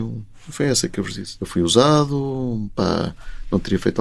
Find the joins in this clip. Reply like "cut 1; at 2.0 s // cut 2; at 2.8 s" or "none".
cut 1; at 1.2 s